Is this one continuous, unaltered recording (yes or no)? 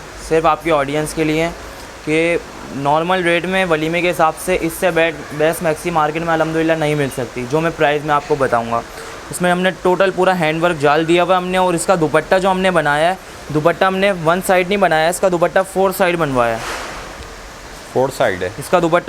yes